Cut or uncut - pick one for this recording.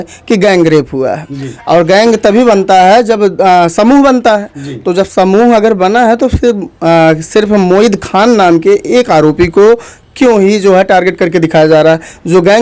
uncut